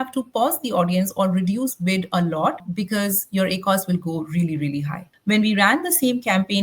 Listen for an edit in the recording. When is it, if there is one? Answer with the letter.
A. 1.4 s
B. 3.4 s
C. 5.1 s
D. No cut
C